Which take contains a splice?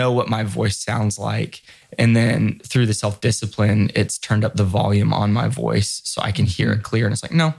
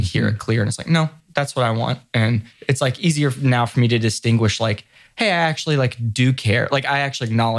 second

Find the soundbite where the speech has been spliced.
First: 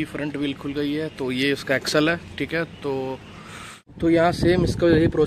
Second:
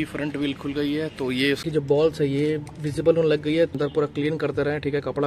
second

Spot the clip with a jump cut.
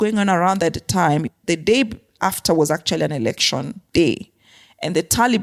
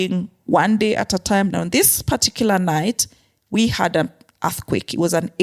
second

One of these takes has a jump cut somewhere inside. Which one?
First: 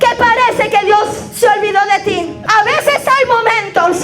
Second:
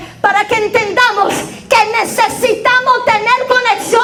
first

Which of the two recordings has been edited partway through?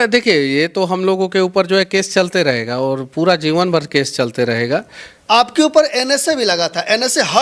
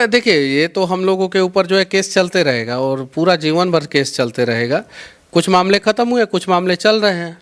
first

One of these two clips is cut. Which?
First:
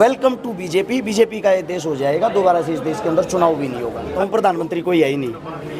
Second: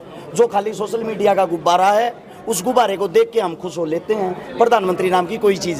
first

